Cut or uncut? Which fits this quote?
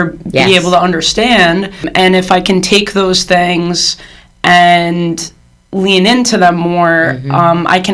cut